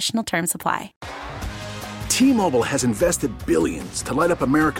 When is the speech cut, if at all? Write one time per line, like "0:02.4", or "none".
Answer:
0:01.0